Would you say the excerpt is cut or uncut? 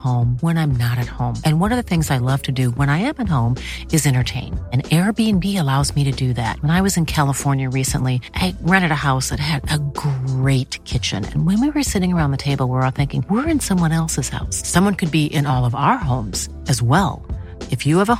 uncut